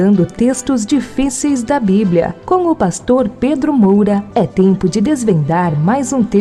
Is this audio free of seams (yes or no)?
yes